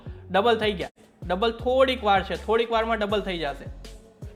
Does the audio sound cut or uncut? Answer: uncut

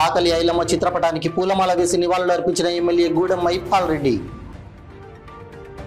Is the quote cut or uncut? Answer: uncut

